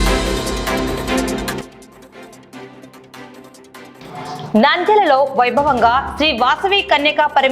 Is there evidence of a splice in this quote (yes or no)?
no